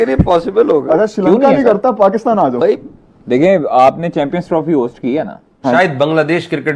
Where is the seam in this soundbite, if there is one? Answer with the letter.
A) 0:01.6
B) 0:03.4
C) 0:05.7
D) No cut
C